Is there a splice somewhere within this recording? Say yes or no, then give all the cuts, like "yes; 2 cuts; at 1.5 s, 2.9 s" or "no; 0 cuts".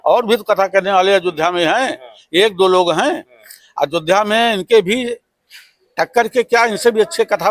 no; 0 cuts